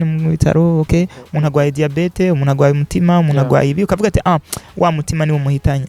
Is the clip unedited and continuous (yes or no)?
yes